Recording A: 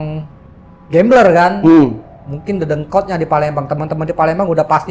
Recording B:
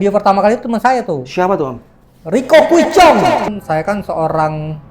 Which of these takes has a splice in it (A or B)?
B